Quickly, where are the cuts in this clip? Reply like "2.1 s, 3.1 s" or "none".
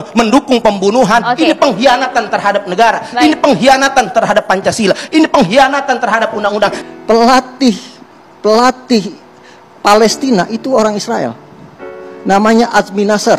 6.8 s